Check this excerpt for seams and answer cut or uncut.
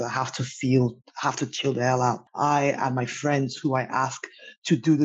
cut